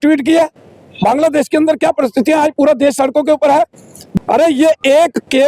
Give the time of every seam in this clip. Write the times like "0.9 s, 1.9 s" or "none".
4.0 s